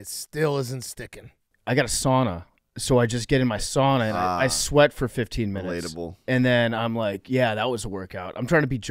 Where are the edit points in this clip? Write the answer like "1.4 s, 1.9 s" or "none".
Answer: 1.5 s